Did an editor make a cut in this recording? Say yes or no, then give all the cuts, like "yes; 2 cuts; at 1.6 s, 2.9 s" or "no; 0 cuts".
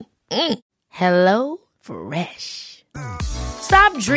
no; 0 cuts